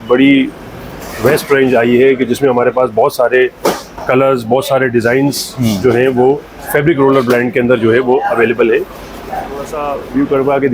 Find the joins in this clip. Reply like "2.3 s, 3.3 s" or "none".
9.7 s